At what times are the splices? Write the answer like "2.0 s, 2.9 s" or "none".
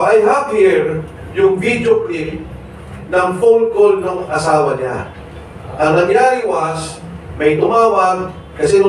none